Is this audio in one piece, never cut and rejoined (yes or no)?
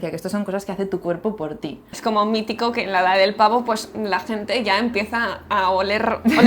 no